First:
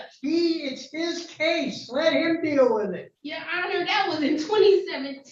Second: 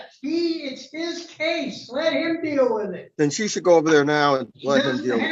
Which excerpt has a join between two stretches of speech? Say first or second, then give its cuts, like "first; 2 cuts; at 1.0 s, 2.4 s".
first; 1 cut; at 3.0 s